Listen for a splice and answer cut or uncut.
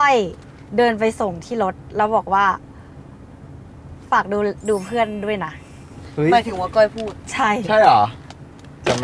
uncut